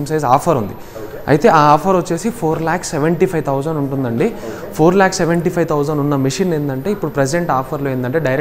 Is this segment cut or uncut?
uncut